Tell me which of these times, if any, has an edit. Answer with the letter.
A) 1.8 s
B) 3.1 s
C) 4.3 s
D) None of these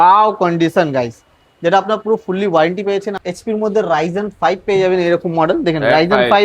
B